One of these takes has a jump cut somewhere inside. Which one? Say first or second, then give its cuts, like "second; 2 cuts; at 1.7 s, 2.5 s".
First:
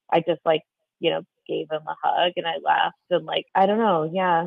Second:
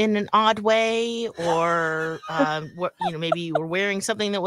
first; 1 cut; at 3.4 s